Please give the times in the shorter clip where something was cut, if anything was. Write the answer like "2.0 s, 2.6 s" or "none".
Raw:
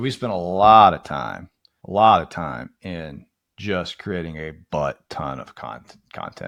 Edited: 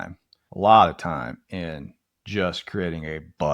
none

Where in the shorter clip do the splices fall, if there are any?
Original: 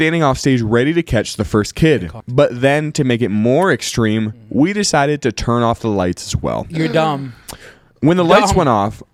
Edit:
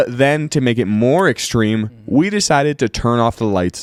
none

